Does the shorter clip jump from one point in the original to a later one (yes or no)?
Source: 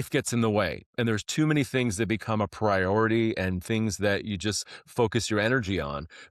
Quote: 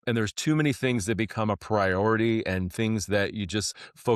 no